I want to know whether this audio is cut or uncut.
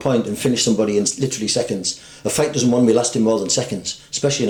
uncut